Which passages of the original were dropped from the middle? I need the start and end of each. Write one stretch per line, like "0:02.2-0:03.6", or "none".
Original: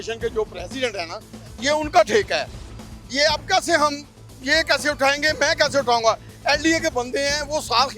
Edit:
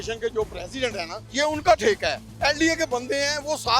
0:01.2-0:01.5
0:02.5-0:06.3